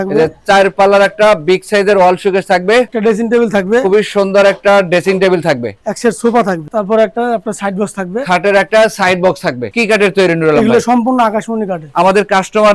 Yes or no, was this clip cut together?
yes